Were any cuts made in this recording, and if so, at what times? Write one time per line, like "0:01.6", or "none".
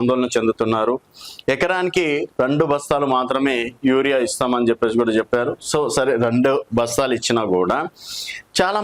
none